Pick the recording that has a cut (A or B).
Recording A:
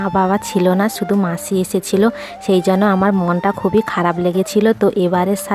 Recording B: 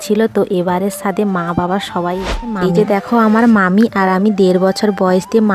B